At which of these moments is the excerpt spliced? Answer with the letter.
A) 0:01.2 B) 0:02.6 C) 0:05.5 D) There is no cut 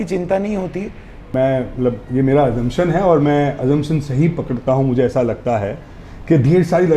A